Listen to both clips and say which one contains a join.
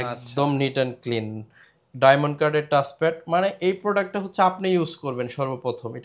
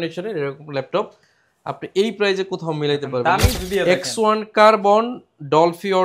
second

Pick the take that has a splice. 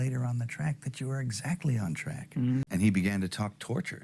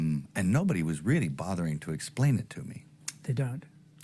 first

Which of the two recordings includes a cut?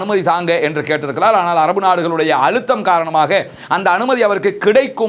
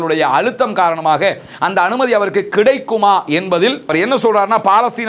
second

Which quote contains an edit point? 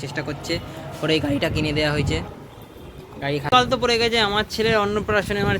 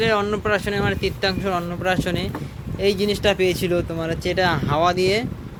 first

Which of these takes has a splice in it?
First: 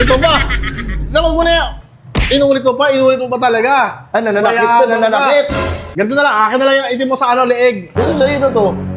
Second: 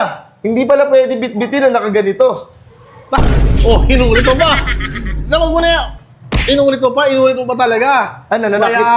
first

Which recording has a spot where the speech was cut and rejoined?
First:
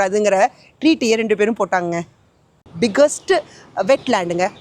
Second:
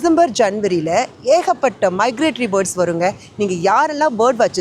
first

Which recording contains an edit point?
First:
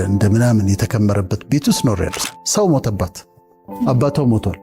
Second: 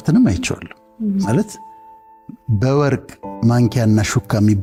first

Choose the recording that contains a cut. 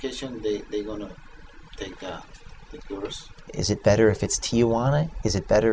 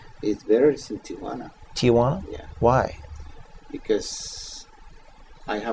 first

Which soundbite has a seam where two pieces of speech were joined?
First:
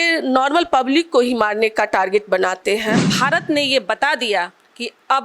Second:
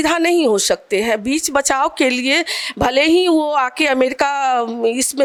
first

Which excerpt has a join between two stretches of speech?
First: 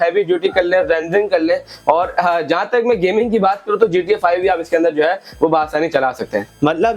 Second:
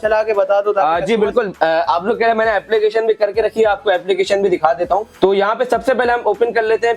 second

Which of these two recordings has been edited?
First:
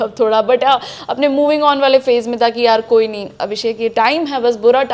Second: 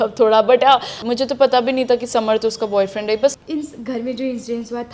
second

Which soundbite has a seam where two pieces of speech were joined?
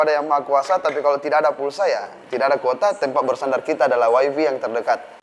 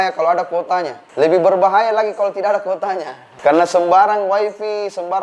second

